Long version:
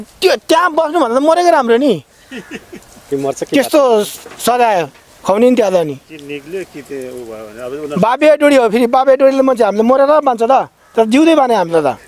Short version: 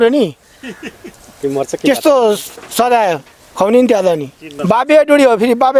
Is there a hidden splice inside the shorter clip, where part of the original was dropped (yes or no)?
yes